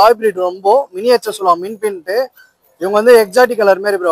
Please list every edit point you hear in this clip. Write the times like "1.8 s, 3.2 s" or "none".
none